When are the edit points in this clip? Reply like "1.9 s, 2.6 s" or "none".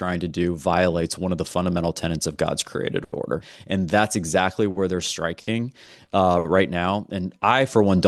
3.5 s